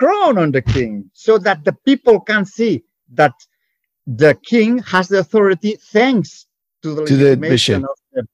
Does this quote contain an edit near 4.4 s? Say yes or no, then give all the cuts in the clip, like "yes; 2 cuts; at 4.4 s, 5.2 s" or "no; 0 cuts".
no; 0 cuts